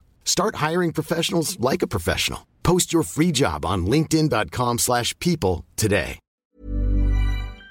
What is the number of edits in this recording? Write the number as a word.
one